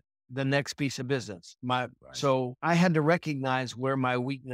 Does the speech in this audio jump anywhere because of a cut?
yes; 1 cut; at 2.6 s

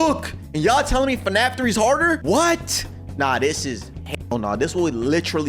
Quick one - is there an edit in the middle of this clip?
yes; 1 cut; at 2.2 s

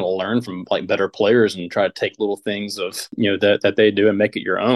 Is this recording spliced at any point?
no; 0 cuts

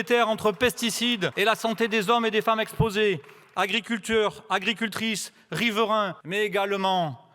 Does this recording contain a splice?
yes; 2 cuts; at 1.3 s, 6.2 s

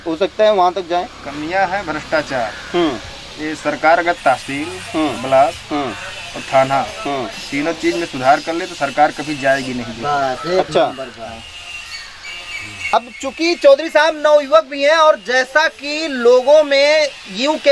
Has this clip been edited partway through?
no; 0 cuts

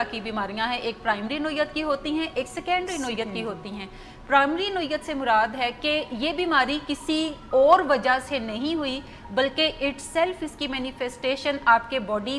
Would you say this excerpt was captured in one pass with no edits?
yes; 0 cuts

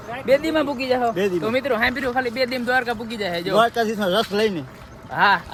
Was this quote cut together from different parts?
no; 0 cuts

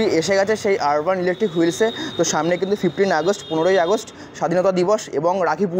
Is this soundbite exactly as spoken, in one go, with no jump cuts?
yes; 0 cuts

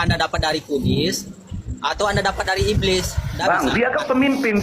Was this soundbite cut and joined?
yes; 1 cut; at 3.4 s

